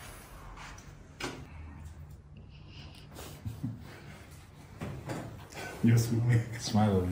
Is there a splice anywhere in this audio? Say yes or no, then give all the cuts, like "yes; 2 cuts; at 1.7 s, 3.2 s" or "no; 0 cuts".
yes; 1 cut; at 1.5 s